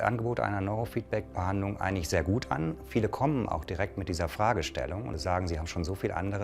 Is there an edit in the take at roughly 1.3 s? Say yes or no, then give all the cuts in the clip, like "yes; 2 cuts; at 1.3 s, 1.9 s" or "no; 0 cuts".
yes; 2 cuts; at 1.3 s, 5.2 s